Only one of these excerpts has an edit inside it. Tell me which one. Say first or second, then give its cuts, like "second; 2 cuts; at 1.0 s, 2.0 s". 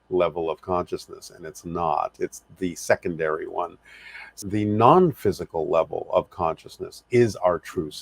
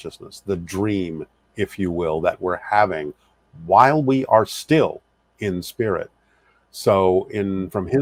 first; 1 cut; at 4.4 s